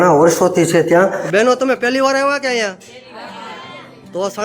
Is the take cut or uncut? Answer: cut